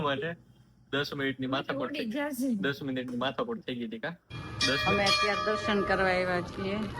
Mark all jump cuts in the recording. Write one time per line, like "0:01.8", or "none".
0:04.8